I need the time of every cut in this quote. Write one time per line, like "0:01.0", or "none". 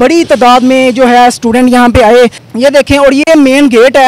0:02.4

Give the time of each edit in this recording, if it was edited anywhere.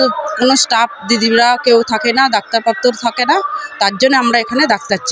none

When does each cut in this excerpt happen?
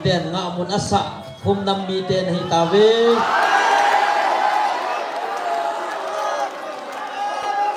none

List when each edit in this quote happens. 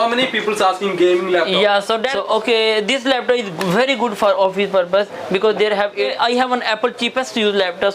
0:02.1
0:05.9

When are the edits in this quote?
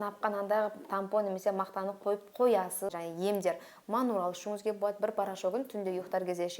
0:03.0

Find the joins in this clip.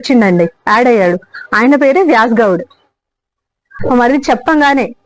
0:03.7

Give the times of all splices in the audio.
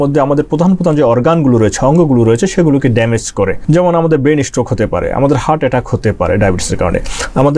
0:03.6

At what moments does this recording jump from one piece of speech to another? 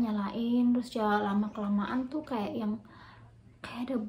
none

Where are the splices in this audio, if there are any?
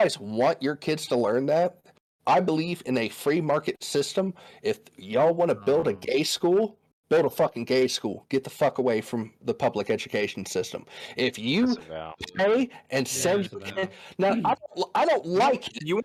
none

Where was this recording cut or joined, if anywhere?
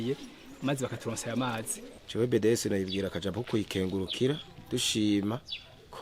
0:01.9

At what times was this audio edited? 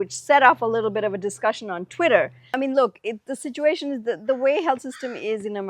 0:02.6

